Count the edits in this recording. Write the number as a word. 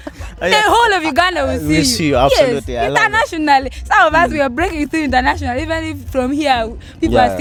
zero